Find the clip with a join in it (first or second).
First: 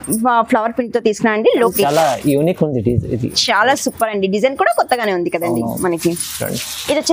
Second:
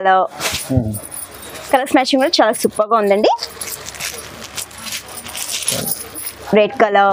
first